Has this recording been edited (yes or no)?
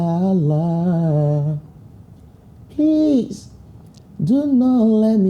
no